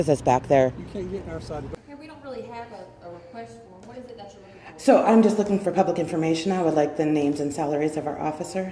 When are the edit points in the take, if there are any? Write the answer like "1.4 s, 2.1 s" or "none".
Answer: 1.7 s